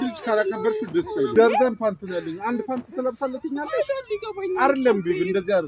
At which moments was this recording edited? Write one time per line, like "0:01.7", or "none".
0:01.3